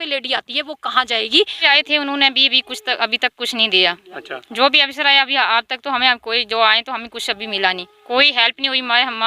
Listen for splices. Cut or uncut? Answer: cut